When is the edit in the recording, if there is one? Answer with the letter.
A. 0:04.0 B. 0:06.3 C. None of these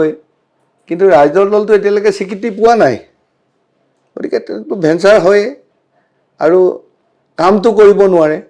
C